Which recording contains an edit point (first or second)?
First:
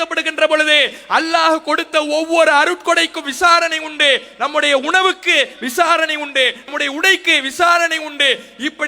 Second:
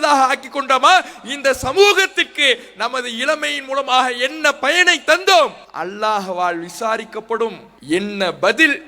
second